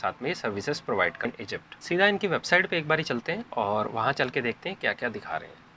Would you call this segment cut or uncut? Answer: cut